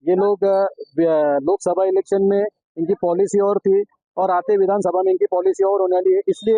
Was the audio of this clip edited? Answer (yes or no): no